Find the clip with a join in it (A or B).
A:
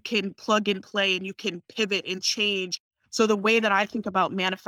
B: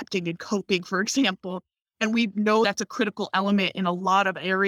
A